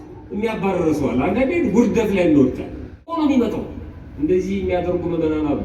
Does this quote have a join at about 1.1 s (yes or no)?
no